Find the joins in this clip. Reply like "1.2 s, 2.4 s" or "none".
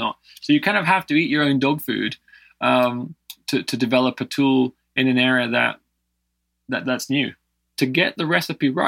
7.8 s